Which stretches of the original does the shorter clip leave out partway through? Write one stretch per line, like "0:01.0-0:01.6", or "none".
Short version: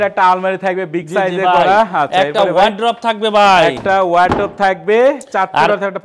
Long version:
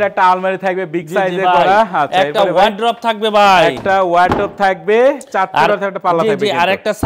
none